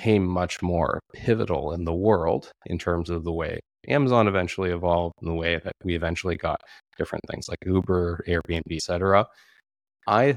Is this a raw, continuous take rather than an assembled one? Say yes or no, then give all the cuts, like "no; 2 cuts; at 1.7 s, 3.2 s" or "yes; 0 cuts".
no; 1 cut; at 8.8 s